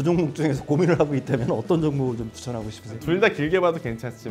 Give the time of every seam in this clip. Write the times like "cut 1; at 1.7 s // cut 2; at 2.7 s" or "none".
cut 1; at 2.9 s